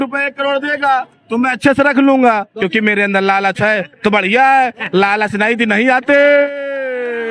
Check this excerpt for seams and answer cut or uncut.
uncut